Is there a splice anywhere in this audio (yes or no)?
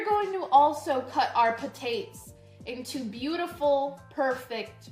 no